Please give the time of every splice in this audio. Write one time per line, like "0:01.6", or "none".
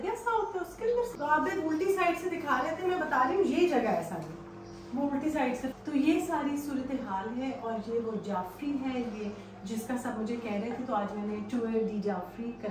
0:01.1
0:05.7